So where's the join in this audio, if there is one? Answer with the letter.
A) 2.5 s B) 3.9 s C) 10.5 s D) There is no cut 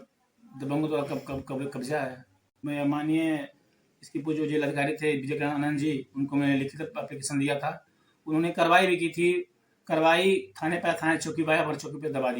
A